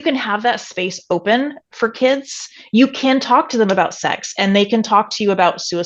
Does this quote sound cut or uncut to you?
uncut